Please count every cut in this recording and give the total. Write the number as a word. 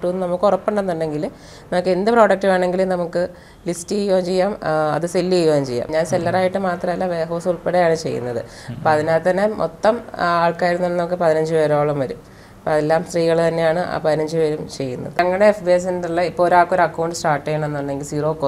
two